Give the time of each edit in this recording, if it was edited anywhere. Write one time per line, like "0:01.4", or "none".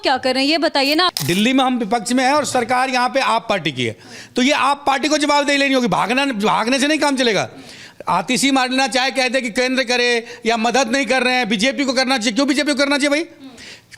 0:01.1